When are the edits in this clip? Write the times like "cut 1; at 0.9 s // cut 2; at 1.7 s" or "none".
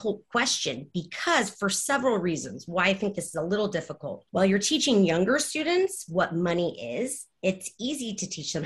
cut 1; at 4.1 s

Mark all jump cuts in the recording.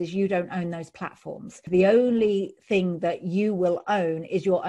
cut 1; at 1.7 s

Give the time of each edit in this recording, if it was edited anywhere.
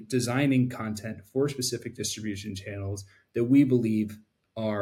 none

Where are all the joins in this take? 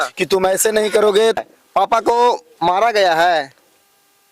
cut 1; at 1.4 s

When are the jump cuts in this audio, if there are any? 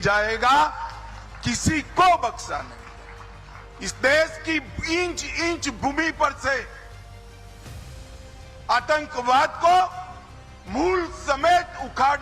cut 1; at 7.1 s // cut 2; at 8.6 s

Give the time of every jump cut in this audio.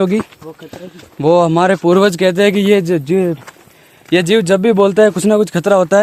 none

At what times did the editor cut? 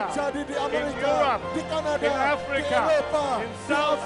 cut 1; at 1.9 s

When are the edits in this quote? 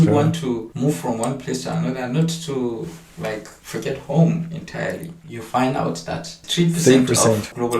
cut 1; at 5.2 s

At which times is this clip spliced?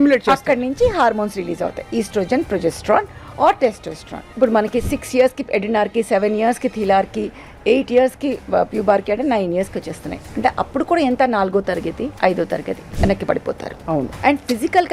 cut 1; at 4.3 s // cut 2; at 12.1 s // cut 3; at 12.8 s // cut 4; at 14.1 s

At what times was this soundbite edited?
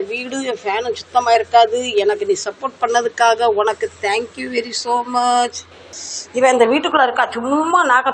none

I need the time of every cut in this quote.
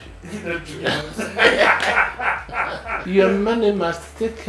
cut 1; at 3.0 s

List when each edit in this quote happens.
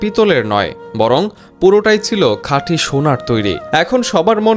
cut 1; at 3.6 s

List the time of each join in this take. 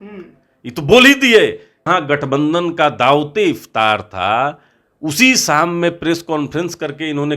cut 1; at 1.9 s

